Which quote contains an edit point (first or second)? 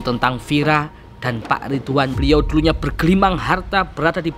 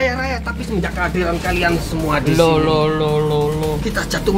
first